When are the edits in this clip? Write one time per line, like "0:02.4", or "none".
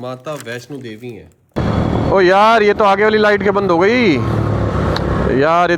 0:01.6